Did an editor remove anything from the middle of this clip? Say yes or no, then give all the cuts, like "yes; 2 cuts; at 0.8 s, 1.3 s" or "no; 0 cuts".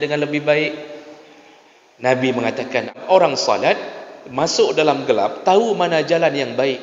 yes; 1 cut; at 2.9 s